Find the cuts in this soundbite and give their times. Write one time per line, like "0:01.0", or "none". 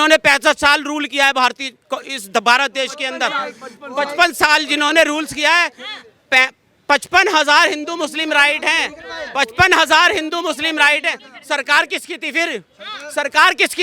none

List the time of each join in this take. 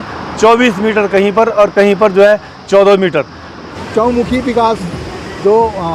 0:03.7

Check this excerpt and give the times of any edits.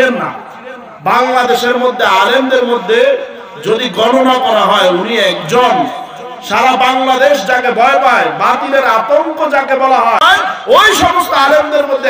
0:10.2

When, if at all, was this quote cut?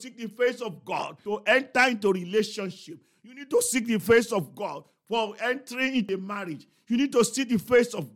0:01.2
0:06.1

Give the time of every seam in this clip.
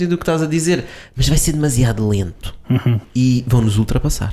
0:03.0

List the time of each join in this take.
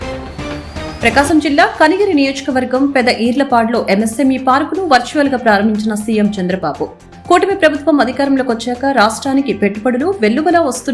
0:00.9

